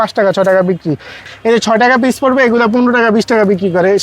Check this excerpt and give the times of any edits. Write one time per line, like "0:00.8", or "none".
0:01.2